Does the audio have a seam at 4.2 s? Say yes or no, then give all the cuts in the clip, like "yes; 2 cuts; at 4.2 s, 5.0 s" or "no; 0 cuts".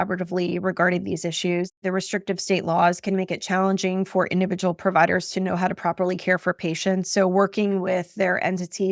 no; 1 cut; at 1.8 s